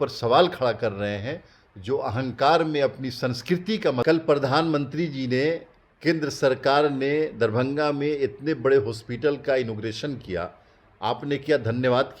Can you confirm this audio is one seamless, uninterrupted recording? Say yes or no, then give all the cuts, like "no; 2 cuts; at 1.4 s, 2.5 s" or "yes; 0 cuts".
no; 1 cut; at 4.0 s